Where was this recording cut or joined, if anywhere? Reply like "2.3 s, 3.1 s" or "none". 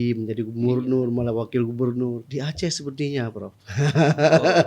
2.2 s